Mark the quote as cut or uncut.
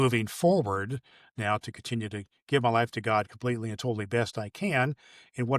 uncut